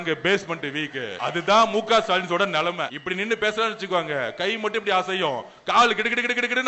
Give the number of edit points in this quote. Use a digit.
2